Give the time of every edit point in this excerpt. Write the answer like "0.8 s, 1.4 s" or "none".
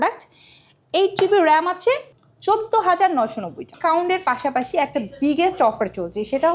2.1 s, 3.7 s

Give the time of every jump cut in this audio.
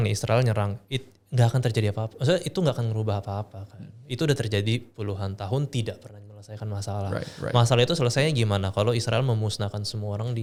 none

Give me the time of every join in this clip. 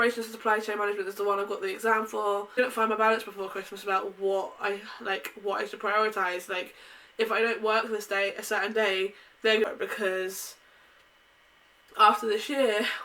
2.5 s, 9.6 s

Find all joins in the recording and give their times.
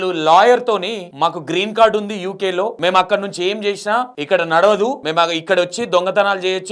1.0 s, 2.7 s, 4.2 s, 5.0 s

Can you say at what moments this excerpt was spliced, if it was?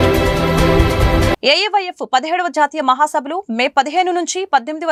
none

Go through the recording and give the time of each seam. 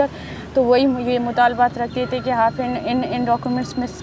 none

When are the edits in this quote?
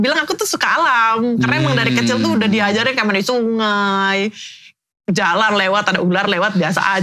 none

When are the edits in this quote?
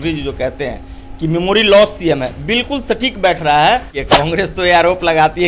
4.0 s

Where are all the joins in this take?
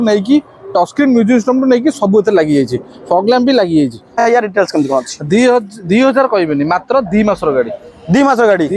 4.3 s

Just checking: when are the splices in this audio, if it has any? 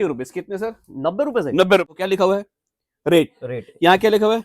1.9 s

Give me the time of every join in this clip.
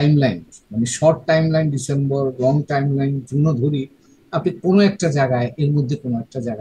none

